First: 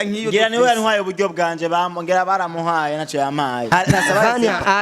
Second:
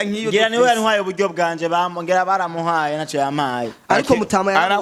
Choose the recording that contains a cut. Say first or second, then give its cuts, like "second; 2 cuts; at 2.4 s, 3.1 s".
first; 1 cut; at 3.7 s